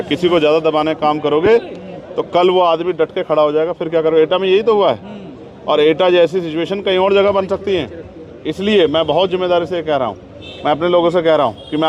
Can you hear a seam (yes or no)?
no